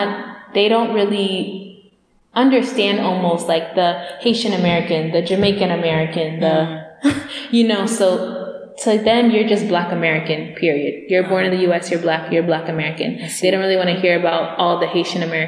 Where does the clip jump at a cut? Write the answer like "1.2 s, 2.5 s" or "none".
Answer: none